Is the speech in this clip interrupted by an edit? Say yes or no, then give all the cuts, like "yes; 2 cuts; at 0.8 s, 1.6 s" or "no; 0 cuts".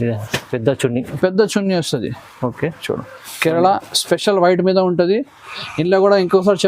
yes; 1 cut; at 3.2 s